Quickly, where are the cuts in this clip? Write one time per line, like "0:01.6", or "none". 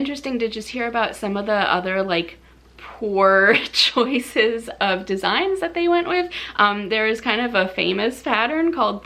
none